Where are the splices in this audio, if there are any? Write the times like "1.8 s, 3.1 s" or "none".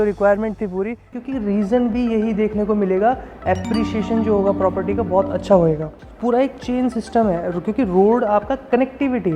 1.1 s, 6.1 s